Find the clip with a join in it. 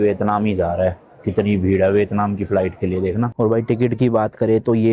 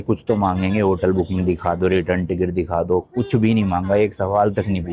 first; 1 cut; at 3.3 s

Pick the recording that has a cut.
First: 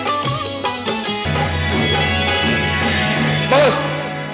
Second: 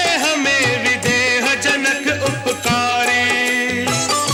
first; 1 cut; at 1.3 s

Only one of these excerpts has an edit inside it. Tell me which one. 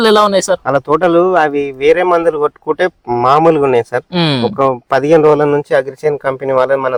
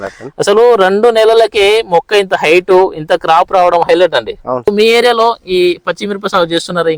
second; 1 cut; at 4.7 s

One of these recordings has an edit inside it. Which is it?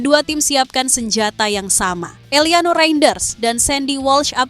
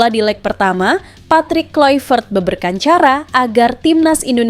first; 1 cut; at 2.2 s

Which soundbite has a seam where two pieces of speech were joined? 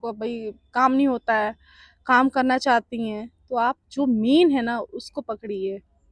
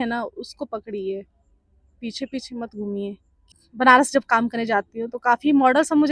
second; 1 cut; at 3.6 s

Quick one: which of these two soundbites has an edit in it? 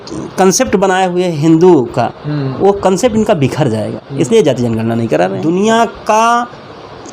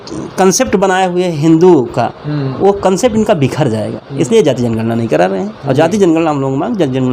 first; 1 cut; at 5.4 s

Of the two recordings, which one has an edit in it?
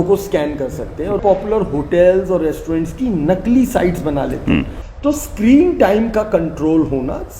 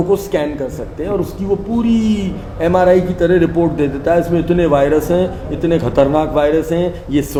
first; 2 cuts; at 1.2 s, 4.8 s

